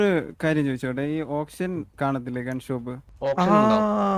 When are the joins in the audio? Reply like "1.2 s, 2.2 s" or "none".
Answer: 3.1 s